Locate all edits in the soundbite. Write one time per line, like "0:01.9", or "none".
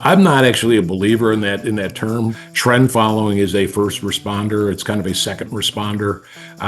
0:02.4